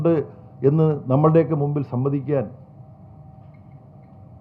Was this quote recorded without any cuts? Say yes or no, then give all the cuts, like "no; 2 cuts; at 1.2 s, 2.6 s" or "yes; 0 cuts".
yes; 0 cuts